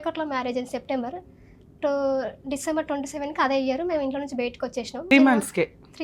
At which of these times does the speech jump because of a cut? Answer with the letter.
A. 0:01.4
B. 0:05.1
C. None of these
B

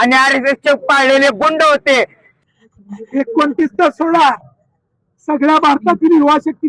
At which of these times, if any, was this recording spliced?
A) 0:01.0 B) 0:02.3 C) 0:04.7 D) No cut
B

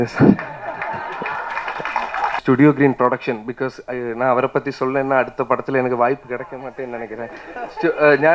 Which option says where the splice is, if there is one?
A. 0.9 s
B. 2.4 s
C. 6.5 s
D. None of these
B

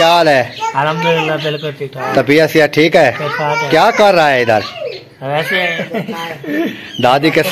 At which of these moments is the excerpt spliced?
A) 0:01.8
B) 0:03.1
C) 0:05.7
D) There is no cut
C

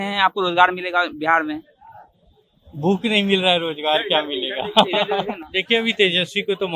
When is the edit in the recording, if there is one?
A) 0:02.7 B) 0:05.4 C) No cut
C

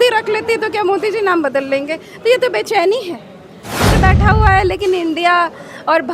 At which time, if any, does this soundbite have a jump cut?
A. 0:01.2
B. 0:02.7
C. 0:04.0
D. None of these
C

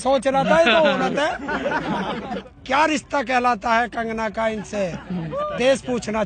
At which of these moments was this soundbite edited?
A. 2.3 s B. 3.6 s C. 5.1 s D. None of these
A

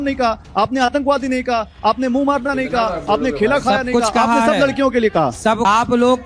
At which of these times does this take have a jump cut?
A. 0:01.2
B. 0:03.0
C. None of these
C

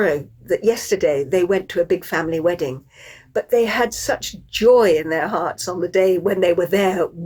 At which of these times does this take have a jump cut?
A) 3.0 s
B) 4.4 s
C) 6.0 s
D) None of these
D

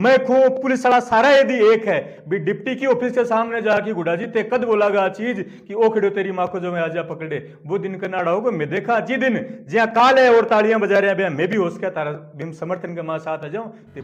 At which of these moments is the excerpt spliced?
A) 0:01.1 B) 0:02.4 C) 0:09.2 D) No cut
D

